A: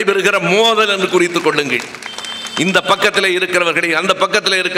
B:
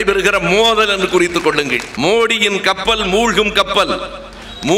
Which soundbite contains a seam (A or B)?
B